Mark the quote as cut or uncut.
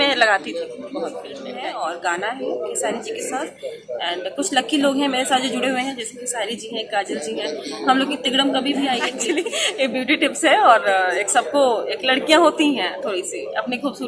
cut